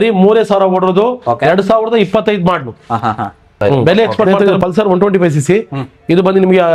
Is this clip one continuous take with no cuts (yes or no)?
no